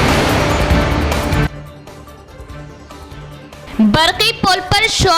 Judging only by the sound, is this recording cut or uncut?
cut